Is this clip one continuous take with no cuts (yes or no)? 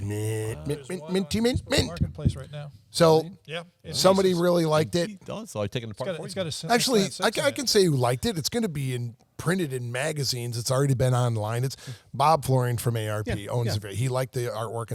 yes